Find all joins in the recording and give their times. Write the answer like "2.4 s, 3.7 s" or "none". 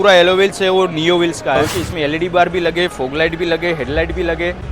1.7 s

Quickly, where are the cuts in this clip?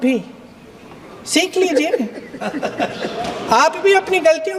none

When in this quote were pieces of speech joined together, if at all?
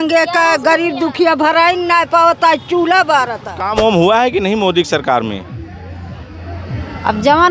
3.6 s

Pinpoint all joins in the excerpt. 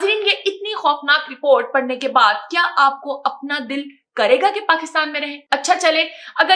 5.3 s

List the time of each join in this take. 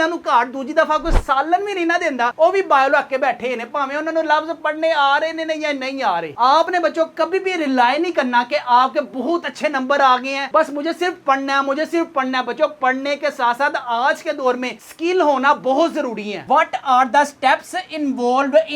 6.4 s, 16.4 s

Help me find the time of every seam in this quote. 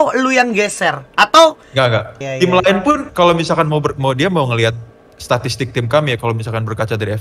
2.2 s

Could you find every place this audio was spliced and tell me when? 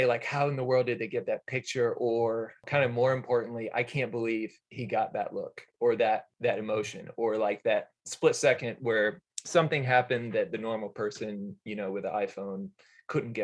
2.6 s, 6.3 s

